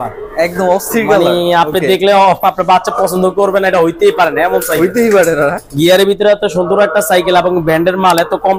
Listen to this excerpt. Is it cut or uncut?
uncut